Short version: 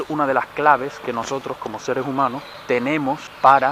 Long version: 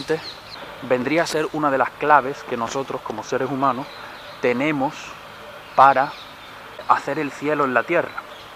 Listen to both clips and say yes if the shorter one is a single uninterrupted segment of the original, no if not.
no